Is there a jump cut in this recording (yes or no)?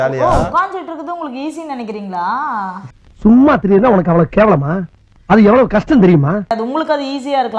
no